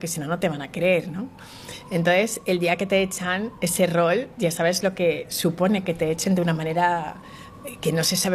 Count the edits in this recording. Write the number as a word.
zero